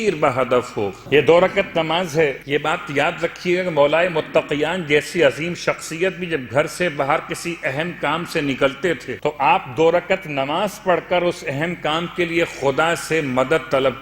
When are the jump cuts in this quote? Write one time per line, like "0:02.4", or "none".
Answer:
0:01.0
0:02.4
0:09.1